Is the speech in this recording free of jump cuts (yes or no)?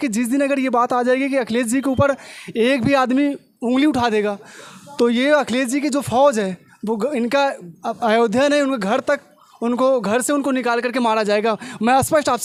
yes